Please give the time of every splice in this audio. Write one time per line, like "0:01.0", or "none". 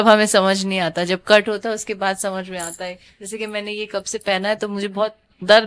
none